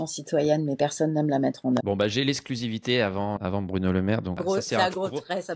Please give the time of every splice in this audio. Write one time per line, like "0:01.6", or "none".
0:01.8
0:03.4
0:04.4